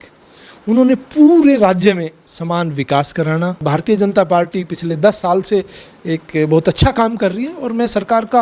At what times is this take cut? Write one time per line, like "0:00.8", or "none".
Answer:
0:03.6